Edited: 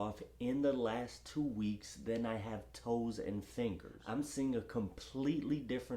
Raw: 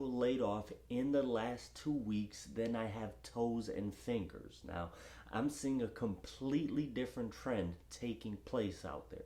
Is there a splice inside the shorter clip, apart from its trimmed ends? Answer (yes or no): yes